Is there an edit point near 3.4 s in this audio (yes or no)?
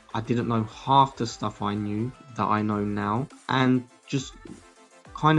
yes